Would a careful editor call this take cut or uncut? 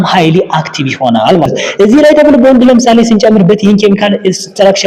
cut